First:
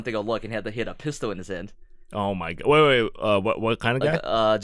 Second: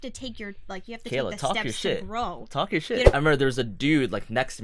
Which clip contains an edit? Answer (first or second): second